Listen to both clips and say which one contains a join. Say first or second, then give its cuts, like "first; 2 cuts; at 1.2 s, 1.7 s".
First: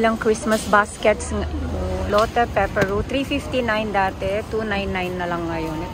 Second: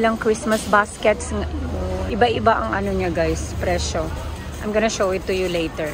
first; 1 cut; at 2.1 s